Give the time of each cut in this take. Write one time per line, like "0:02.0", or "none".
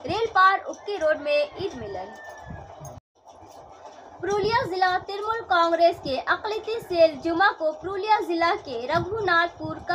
0:03.2